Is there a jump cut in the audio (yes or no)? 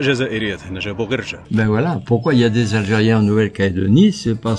yes